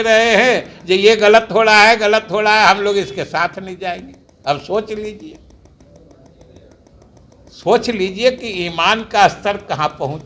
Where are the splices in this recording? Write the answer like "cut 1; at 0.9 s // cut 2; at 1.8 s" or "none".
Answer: none